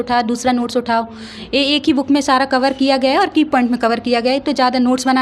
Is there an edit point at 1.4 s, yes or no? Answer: no